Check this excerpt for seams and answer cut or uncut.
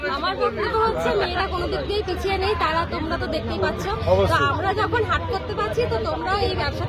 uncut